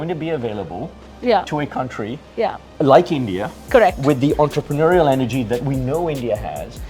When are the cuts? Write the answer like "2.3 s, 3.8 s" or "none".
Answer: 2.6 s